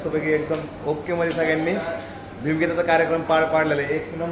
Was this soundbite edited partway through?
no; 0 cuts

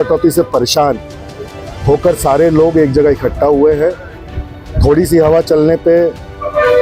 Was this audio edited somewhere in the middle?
no; 0 cuts

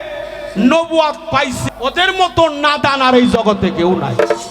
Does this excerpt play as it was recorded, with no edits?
no; 1 cut; at 1.6 s

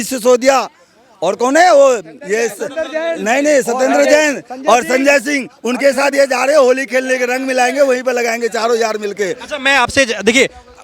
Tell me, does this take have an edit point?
no; 0 cuts

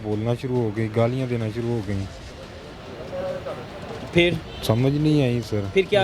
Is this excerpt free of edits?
yes; 0 cuts

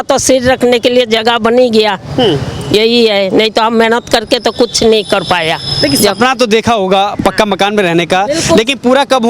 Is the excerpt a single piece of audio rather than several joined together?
yes; 0 cuts

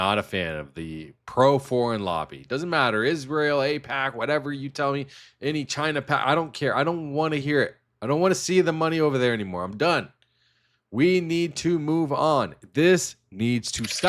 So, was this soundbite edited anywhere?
no; 0 cuts

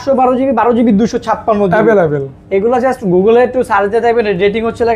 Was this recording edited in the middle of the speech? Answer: no; 0 cuts

